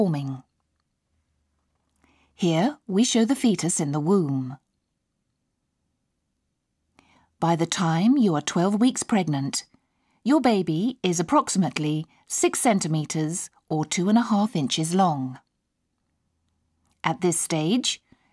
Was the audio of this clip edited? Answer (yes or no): no